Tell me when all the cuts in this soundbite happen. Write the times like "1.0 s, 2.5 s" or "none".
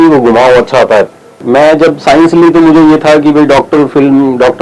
1.4 s